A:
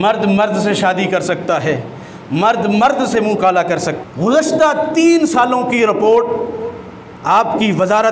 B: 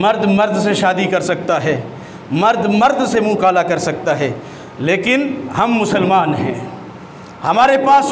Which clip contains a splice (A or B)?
A